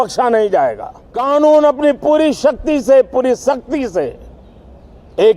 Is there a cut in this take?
yes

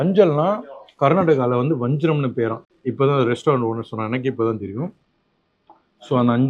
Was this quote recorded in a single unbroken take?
yes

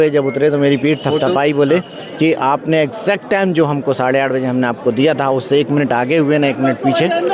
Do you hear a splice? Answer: no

